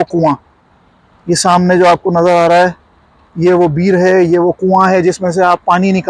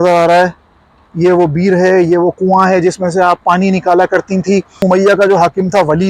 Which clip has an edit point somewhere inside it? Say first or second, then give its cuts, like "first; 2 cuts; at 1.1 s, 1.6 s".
second; 1 cut; at 4.8 s